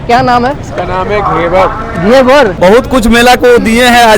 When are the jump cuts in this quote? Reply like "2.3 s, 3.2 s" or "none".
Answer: 2.5 s

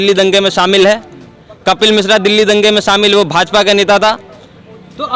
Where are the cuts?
none

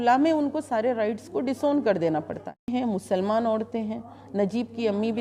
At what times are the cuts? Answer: 2.7 s

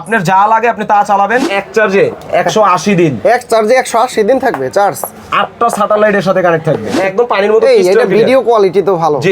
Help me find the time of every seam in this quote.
1.5 s, 7.0 s

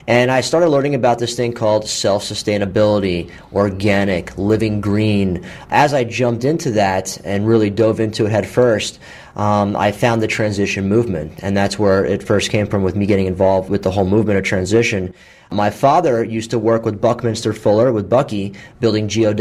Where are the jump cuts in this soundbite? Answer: none

